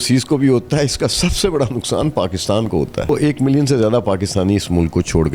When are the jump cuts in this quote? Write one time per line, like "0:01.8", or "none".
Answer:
0:03.1